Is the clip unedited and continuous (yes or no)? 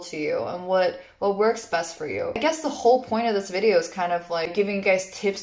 no